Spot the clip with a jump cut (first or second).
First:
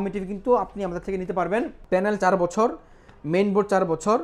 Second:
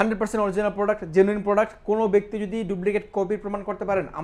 first